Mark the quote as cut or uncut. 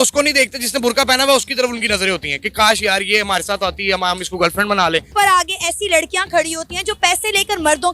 cut